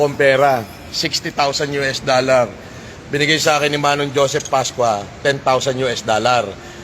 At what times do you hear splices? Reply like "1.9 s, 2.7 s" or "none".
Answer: 4.0 s